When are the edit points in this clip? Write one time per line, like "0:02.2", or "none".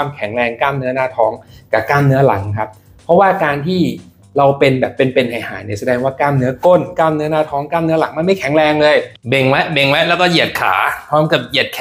0:09.2